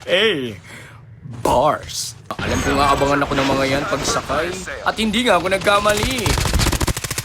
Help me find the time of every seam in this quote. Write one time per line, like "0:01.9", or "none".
0:02.4